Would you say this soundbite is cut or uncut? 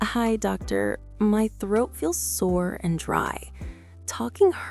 uncut